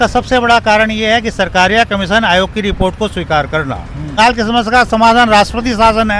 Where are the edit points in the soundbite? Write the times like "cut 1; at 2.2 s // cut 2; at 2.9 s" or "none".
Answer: cut 1; at 4.1 s

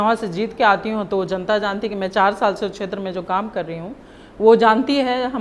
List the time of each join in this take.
none

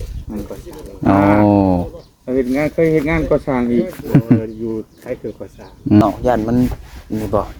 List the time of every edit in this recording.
cut 1; at 6.0 s

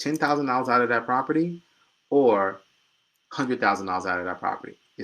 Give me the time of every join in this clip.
none

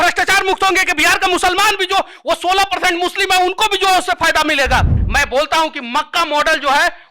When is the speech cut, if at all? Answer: cut 1; at 5.0 s

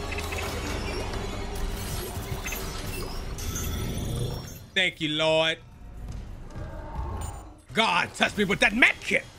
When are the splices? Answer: none

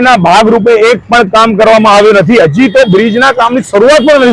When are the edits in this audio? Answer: none

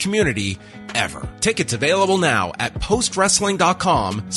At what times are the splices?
cut 1; at 1.2 s

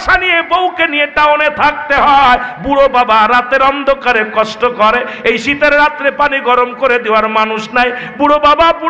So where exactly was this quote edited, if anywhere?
none

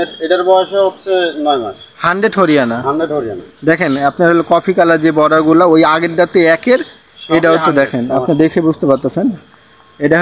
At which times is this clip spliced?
none

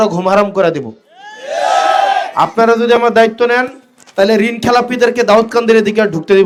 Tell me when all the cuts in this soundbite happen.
none

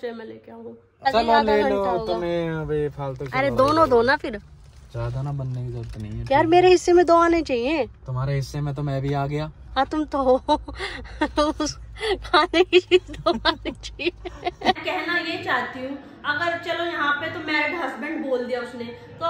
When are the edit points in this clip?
cut 1; at 1.1 s // cut 2; at 14.8 s

